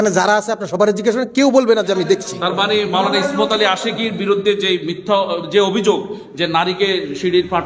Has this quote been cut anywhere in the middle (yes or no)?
no